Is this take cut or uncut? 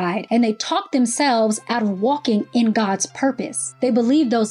uncut